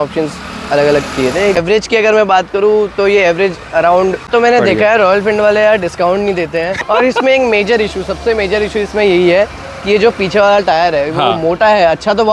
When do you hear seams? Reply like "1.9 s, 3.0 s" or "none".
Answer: 1.5 s, 4.3 s, 6.8 s